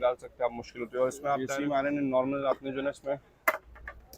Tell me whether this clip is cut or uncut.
cut